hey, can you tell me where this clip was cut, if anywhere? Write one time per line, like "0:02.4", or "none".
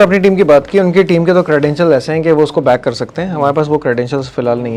none